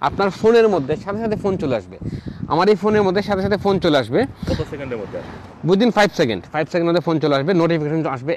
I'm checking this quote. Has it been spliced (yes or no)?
no